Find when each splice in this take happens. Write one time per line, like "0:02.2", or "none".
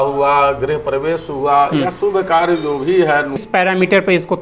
0:03.4